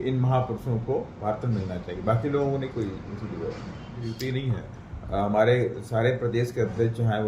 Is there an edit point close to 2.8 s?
no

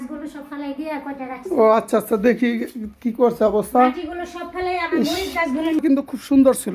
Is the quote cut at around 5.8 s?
yes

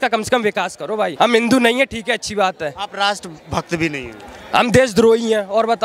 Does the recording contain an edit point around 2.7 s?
no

